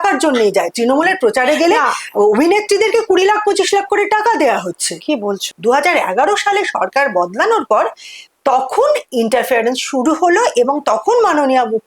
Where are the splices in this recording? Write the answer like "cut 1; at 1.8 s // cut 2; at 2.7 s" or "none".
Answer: cut 1; at 5.4 s